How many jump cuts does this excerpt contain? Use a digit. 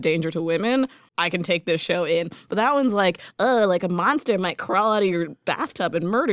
1